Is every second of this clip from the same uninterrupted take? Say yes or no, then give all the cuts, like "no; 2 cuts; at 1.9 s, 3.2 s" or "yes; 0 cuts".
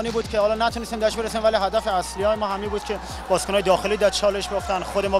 yes; 0 cuts